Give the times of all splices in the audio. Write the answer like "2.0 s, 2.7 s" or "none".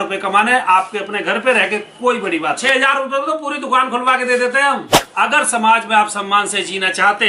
2.6 s, 5.0 s